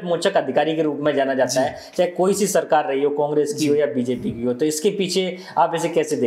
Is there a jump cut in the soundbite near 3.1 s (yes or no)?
no